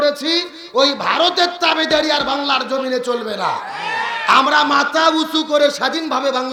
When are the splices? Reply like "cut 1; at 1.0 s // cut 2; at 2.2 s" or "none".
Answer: none